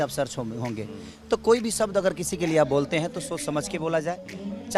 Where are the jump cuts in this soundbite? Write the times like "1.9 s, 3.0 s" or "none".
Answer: none